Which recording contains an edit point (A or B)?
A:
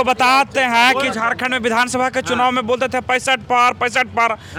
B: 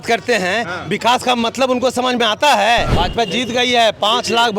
B